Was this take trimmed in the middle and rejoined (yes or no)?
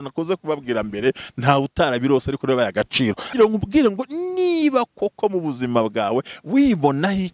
yes